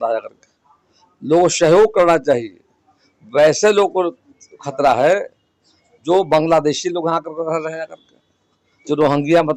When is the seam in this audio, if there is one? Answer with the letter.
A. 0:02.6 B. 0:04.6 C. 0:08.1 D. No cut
D